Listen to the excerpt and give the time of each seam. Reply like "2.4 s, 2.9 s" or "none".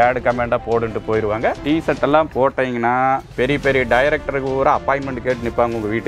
1.6 s, 3.3 s

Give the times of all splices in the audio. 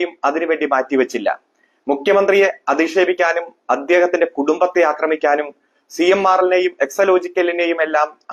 none

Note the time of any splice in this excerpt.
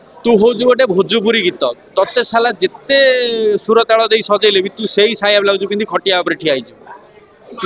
none

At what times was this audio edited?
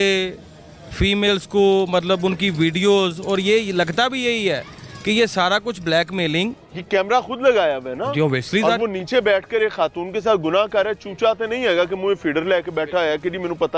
none

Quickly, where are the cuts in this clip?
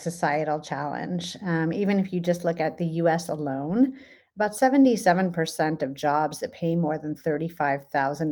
none

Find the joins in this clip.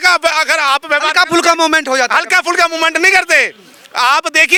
none

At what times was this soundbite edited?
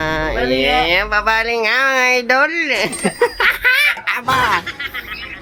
none

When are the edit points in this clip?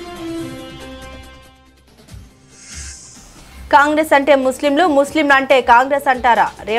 3.7 s

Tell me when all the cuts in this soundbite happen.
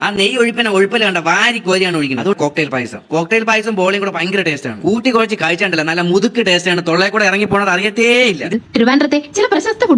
2.4 s, 8.5 s

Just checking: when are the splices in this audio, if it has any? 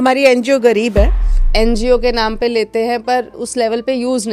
1.4 s, 3.4 s

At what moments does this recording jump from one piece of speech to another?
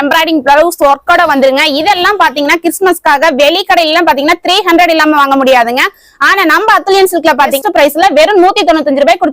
7.6 s

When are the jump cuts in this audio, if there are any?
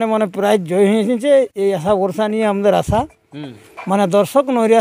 none

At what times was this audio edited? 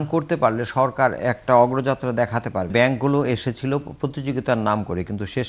2.7 s

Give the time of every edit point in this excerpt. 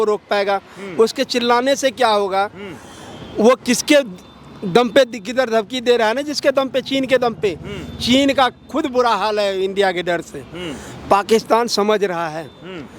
none

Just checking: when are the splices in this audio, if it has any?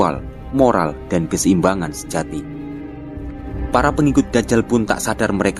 3.5 s

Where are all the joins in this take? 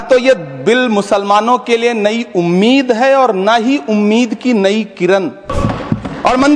5.5 s

